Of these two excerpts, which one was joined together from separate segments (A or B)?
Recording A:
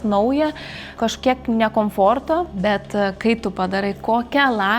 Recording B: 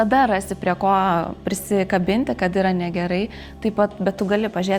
A